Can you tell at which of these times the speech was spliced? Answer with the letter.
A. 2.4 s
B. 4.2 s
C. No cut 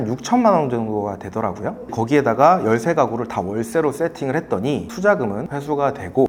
C